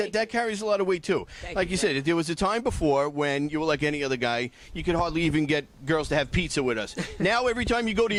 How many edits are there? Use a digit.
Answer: 0